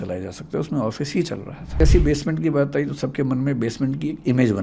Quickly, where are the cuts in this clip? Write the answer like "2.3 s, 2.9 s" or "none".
1.8 s